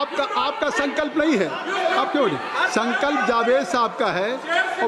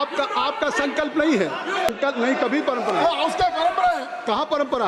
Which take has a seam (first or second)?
second